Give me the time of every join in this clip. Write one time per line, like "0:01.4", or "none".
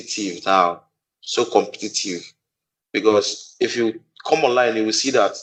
none